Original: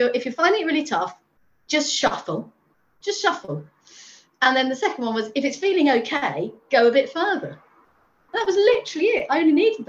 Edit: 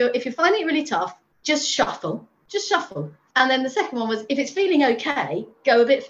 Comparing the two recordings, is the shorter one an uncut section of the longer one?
no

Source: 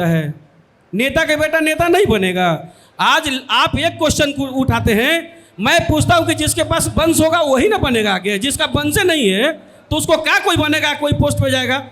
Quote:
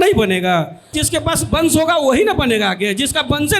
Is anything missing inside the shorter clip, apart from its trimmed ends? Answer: yes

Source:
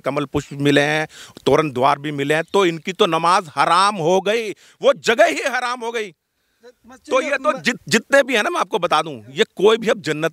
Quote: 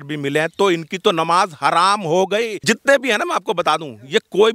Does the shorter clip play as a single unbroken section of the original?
no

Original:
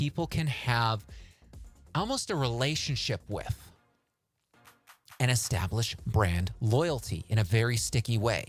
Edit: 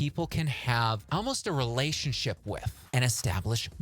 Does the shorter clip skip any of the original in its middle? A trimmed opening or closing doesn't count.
yes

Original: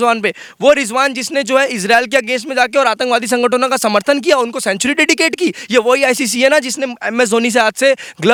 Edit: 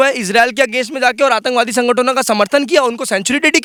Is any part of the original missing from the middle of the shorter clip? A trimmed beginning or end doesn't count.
no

